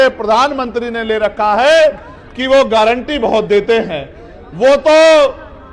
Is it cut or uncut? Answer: uncut